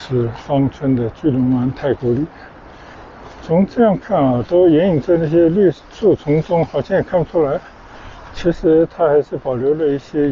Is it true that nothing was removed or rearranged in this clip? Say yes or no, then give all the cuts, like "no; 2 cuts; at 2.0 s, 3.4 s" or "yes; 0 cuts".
yes; 0 cuts